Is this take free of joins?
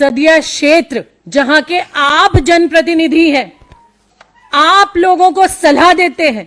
no; 1 cut; at 1.2 s

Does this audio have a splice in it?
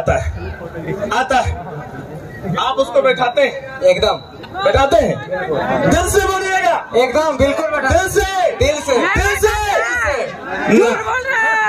no; 0 cuts

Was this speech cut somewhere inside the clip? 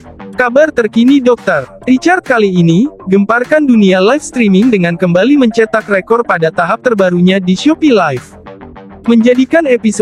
no; 0 cuts

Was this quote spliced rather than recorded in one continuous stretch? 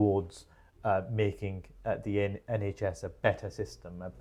no; 0 cuts

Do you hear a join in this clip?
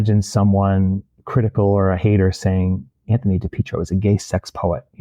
yes; 1 cut; at 1.1 s

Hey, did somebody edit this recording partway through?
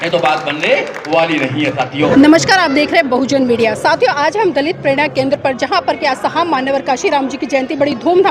no; 0 cuts

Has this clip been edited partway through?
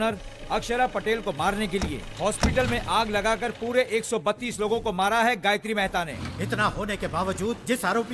yes; 1 cut; at 6.1 s

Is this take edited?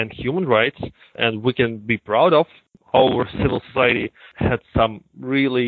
yes; 1 cut; at 2.6 s

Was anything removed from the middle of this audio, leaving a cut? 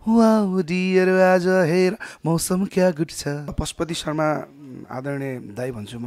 yes; 1 cut; at 3.6 s

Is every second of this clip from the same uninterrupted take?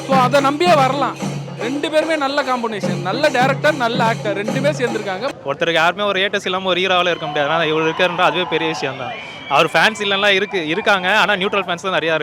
no; 1 cut; at 5.3 s

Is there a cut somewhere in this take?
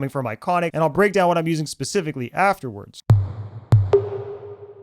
yes; 2 cuts; at 0.9 s, 2.8 s

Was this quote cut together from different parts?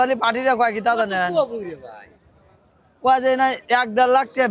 no; 0 cuts

